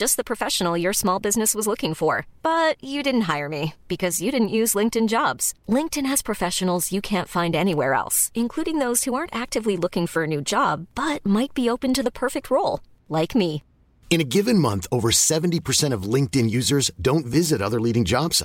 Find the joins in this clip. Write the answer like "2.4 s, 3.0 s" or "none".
none